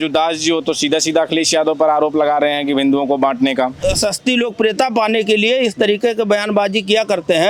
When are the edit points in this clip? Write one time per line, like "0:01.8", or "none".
0:03.8